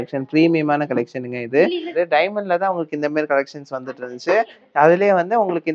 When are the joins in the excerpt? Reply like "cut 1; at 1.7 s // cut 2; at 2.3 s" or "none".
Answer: cut 1; at 1.9 s